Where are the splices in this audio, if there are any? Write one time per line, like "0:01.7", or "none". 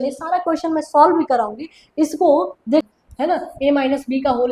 0:02.8